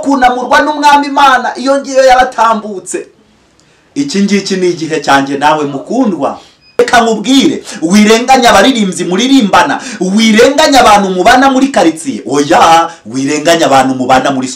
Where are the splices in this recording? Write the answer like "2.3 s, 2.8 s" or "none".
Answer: 6.8 s